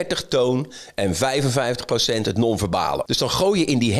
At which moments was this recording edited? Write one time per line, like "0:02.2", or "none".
0:03.0